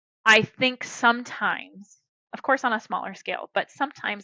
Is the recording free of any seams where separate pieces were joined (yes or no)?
yes